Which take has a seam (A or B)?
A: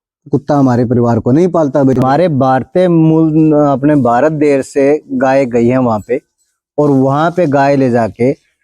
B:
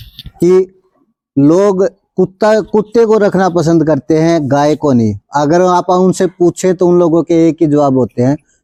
A